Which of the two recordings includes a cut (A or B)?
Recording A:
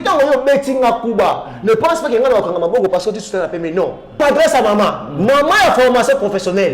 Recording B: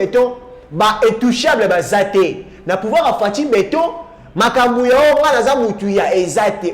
A